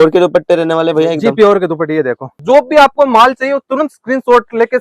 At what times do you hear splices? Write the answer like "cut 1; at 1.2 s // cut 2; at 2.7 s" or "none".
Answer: cut 1; at 2.4 s